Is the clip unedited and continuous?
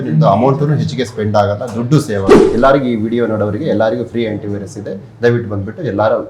no; 1 cut; at 2.4 s

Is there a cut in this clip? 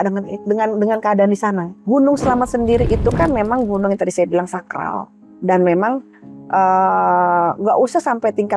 yes; 1 cut; at 1.7 s

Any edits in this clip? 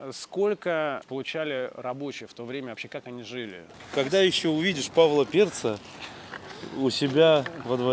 yes; 2 cuts; at 1.0 s, 3.7 s

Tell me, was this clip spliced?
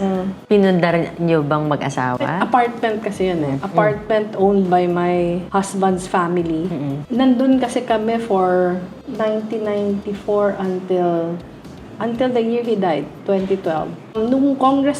yes; 1 cut; at 14.0 s

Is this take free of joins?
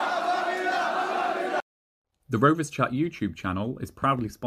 no; 1 cut; at 1.6 s

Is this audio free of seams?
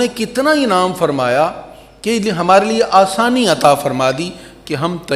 yes; 0 cuts

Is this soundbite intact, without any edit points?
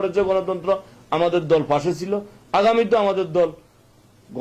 yes; 0 cuts

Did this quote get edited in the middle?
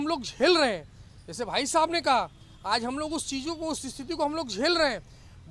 no; 0 cuts

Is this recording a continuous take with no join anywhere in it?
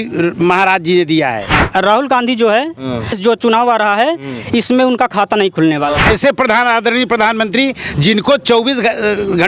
no; 3 cuts; at 1.5 s, 3.2 s, 6.0 s

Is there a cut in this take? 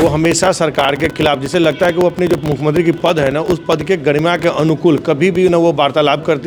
no; 0 cuts

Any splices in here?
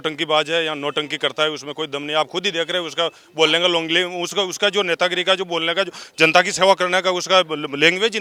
no; 0 cuts

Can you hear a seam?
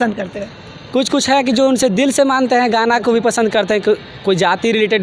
no; 0 cuts

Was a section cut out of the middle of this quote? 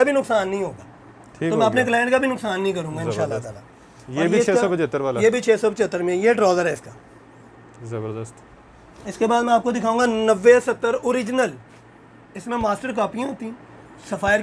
no; 0 cuts

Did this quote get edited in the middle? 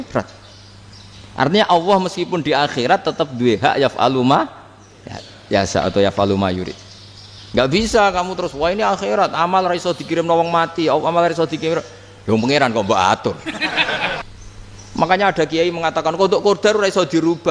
yes; 1 cut; at 14.2 s

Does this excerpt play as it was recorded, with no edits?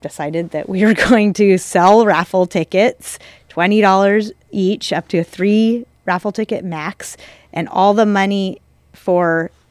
yes; 0 cuts

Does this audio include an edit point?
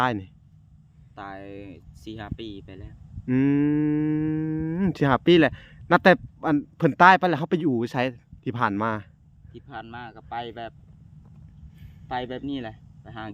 no; 0 cuts

